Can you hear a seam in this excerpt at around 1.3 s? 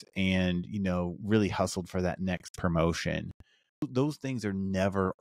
no; 1 cut; at 3.8 s

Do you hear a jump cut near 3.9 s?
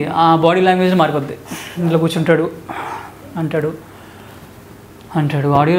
no; 0 cuts

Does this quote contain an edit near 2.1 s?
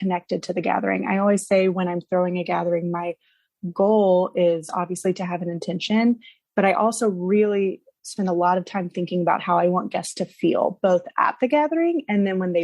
no; 0 cuts

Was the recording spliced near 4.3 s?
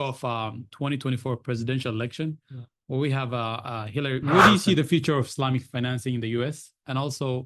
yes; 1 cut; at 4.3 s

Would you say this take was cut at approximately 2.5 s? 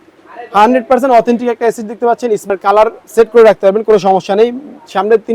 yes; 1 cut; at 2.5 s

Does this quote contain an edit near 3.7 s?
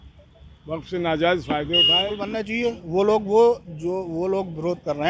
no; 1 cut; at 2.4 s

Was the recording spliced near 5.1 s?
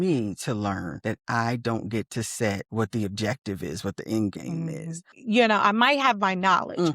yes; 3 cuts; at 0.9 s, 2.6 s, 5.1 s

